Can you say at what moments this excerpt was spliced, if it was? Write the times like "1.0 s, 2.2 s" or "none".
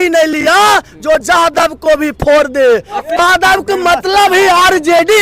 3.2 s